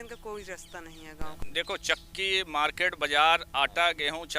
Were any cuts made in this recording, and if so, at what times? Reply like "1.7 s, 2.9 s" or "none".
1.4 s